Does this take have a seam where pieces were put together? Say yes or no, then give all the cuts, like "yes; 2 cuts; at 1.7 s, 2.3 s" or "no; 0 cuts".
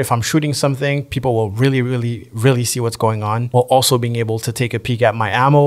no; 0 cuts